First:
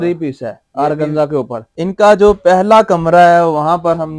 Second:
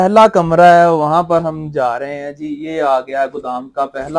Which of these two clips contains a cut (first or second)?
first